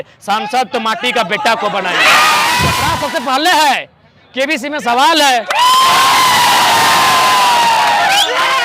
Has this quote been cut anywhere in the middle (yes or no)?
yes